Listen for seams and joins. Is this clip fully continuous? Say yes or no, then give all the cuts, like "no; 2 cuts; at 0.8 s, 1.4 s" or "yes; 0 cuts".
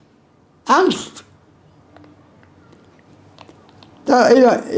yes; 0 cuts